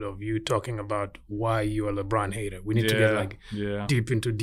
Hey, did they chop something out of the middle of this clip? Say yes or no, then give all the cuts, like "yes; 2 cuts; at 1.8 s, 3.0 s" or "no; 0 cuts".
no; 0 cuts